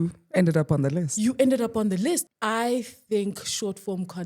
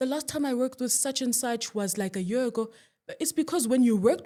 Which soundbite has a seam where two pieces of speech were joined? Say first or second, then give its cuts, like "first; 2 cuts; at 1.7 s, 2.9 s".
first; 1 cut; at 2.3 s